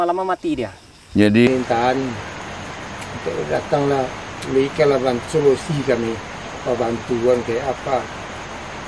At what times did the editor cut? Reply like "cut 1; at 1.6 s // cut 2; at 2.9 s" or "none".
cut 1; at 1.5 s